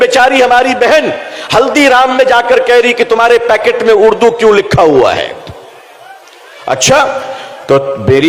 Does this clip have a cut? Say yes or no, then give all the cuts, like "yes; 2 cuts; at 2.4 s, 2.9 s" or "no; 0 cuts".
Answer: no; 0 cuts